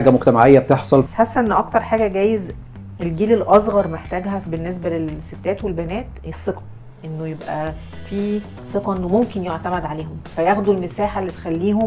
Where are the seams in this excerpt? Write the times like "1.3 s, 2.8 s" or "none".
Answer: 1.1 s